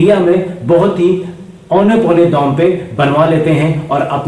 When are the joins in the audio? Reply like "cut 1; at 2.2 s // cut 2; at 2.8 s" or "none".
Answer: none